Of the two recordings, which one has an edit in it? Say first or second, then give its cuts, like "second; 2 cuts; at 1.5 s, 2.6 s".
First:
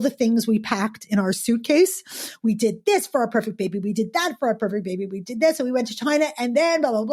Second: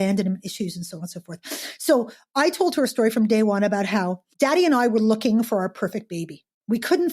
second; 1 cut; at 4.2 s